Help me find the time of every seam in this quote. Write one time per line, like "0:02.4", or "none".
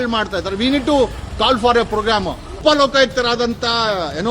0:02.6